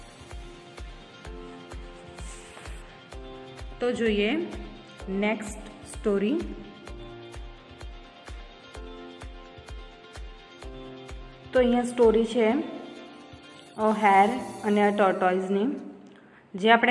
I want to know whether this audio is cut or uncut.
uncut